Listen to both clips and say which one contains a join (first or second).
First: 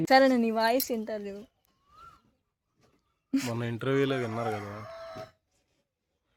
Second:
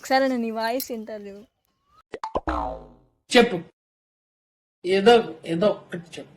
second